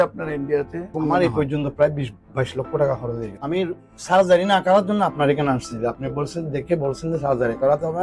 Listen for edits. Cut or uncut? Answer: cut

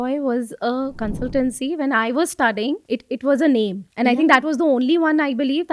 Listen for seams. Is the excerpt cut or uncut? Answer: cut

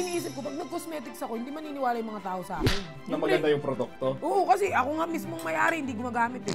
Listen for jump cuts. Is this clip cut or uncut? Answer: uncut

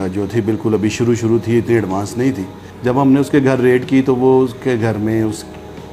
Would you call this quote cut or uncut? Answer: cut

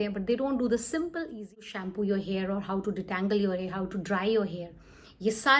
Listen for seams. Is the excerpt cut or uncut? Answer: cut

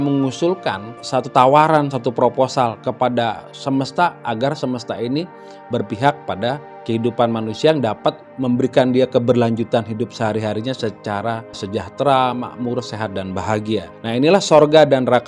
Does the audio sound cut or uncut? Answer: cut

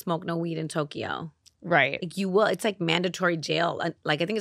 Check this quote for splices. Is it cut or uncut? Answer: uncut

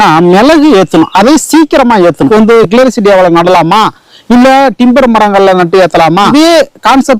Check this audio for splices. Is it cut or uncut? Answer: cut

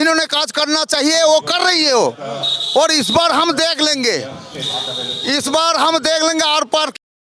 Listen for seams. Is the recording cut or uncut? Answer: uncut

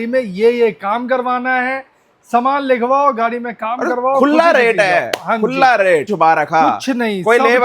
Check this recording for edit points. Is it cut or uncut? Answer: cut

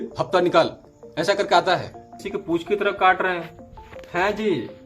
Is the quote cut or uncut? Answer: cut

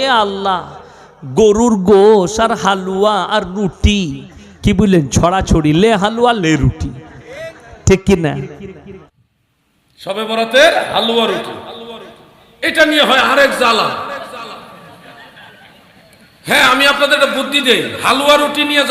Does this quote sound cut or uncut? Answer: cut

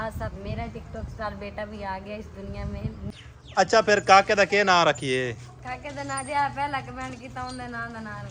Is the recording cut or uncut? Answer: cut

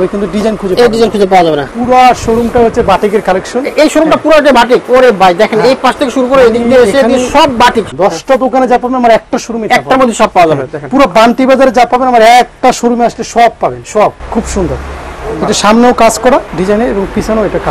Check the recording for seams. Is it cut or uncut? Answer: cut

